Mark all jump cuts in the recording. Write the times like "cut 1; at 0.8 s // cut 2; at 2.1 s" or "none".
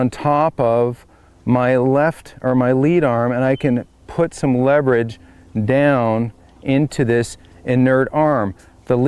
none